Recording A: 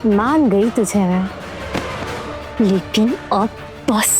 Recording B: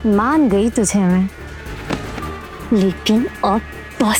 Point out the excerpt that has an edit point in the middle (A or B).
A